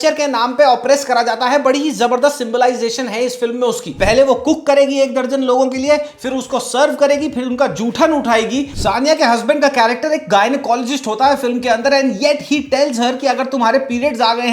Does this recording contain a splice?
yes; 2 cuts; at 3.9 s, 8.7 s

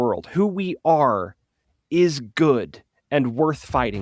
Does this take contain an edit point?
no; 0 cuts

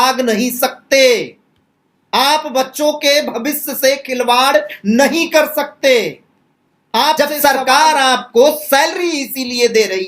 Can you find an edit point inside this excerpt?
yes; 1 cut; at 7.2 s

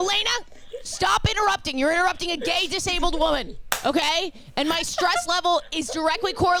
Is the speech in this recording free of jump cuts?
yes; 0 cuts

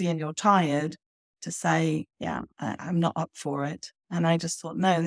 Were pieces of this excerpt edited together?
no; 0 cuts

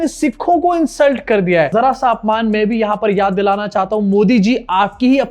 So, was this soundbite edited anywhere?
yes; 1 cut; at 1.7 s

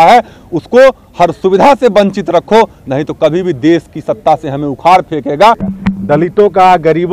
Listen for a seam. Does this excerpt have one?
yes; 1 cut; at 5.7 s

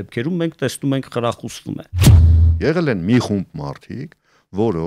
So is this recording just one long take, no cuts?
no; 1 cut; at 2.3 s

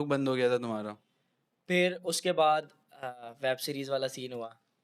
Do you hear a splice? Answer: no; 0 cuts

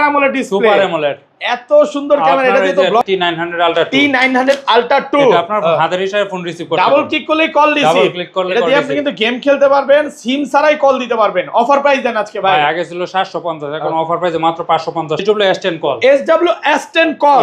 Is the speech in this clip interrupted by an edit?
yes; 2 cuts; at 3.0 s, 15.2 s

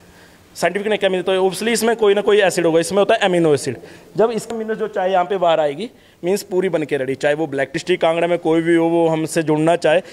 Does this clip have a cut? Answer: yes; 2 cuts; at 4.5 s, 7.8 s

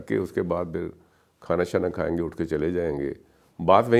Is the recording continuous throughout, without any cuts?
yes; 0 cuts

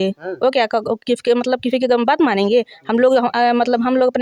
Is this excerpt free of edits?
yes; 0 cuts

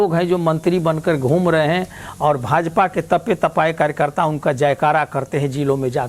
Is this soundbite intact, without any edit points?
yes; 0 cuts

